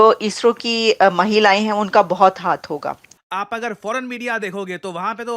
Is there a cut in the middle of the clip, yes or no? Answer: yes